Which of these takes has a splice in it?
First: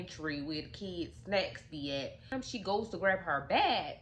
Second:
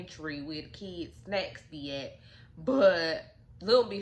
first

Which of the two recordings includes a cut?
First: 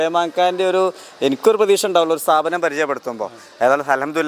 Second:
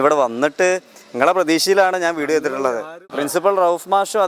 second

